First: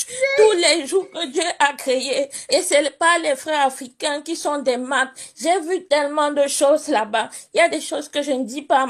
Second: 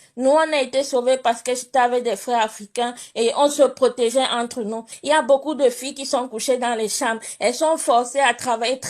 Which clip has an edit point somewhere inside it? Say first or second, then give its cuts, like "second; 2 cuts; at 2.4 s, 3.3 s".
second; 1 cut; at 4.9 s